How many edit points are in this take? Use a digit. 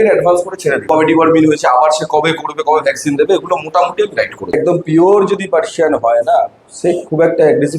2